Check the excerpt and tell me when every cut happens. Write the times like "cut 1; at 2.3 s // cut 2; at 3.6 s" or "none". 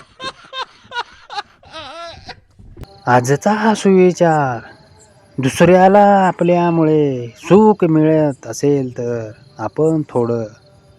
cut 1; at 2.9 s